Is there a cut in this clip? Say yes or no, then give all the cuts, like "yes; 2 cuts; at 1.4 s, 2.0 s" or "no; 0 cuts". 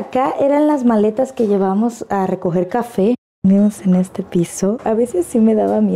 yes; 2 cuts; at 3.3 s, 4.8 s